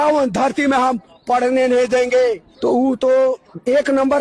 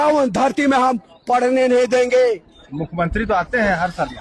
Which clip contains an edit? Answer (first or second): first